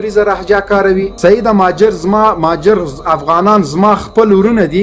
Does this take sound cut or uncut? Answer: uncut